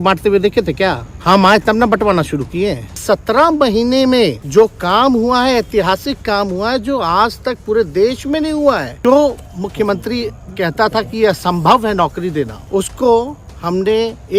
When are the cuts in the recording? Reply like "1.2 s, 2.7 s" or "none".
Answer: 1.1 s, 3.0 s, 4.4 s, 8.9 s, 12.6 s